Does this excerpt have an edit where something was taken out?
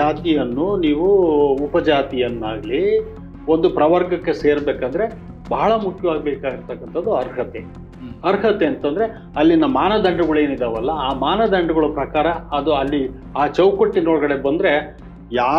no; 0 cuts

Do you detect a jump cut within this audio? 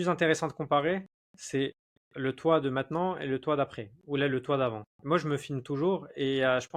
no; 0 cuts

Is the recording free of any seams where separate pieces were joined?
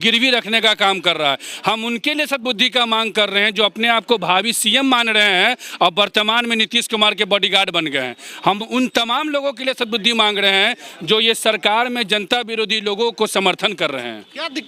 yes; 0 cuts

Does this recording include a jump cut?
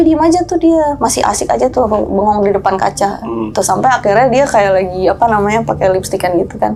no; 0 cuts

